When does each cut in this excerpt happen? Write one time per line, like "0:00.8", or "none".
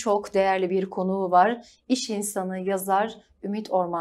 none